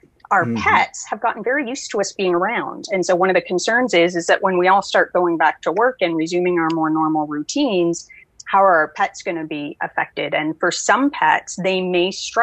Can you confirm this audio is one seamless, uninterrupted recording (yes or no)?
yes